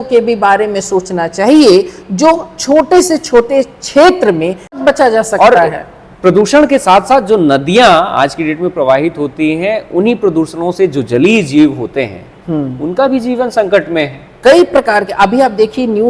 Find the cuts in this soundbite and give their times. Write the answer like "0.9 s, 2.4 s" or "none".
4.7 s